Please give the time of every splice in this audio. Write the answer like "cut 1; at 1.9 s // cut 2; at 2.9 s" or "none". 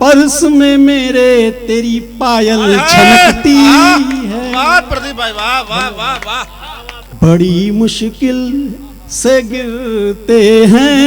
cut 1; at 7.0 s